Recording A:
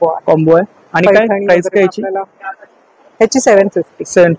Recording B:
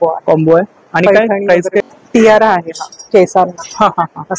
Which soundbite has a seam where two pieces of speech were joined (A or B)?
B